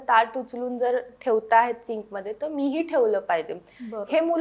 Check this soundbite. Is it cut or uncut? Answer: uncut